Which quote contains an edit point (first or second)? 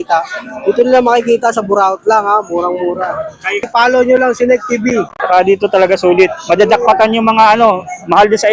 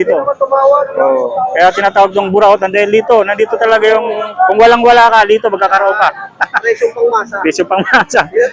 first